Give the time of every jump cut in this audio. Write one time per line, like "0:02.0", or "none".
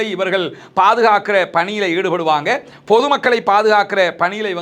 none